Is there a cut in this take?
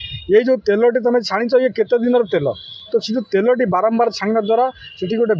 no; 0 cuts

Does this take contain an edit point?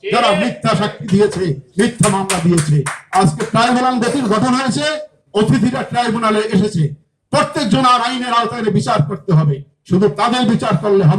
no; 0 cuts

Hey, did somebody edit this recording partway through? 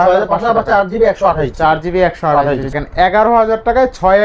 yes; 1 cut; at 2.7 s

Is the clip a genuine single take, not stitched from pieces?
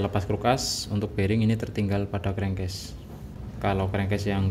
no; 1 cut; at 3.3 s

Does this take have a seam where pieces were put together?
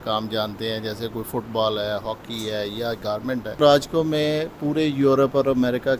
yes; 1 cut; at 3.6 s

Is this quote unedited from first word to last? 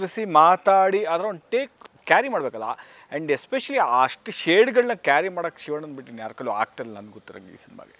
yes; 0 cuts

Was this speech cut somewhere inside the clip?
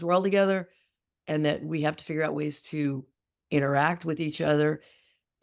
no; 0 cuts

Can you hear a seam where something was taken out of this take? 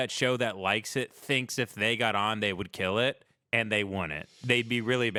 no; 0 cuts

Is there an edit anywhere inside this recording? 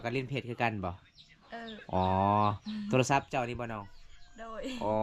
no; 0 cuts

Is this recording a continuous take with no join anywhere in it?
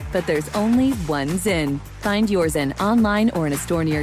yes; 0 cuts

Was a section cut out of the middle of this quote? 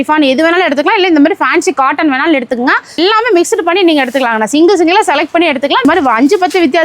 yes; 2 cuts; at 3.0 s, 5.8 s

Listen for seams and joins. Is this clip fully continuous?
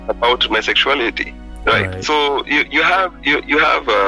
yes; 0 cuts

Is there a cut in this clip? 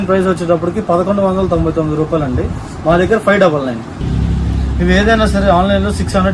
yes; 1 cut; at 4.0 s

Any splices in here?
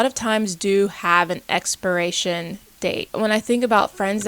yes; 1 cut; at 3.1 s

